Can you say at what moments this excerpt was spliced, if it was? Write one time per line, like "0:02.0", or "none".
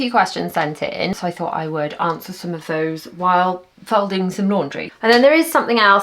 0:01.1
0:04.8